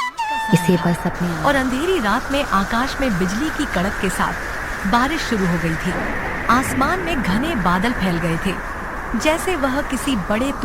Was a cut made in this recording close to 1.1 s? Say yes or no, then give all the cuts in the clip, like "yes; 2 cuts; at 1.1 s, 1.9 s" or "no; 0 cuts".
yes; 1 cut; at 1.1 s